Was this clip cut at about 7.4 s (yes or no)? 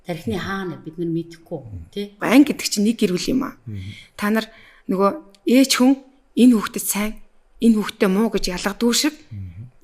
no